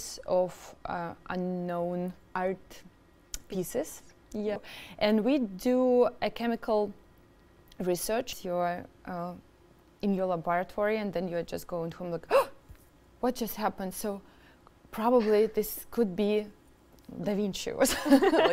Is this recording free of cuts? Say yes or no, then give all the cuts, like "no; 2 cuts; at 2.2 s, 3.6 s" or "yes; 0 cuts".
no; 3 cuts; at 2.2 s, 4.6 s, 8.4 s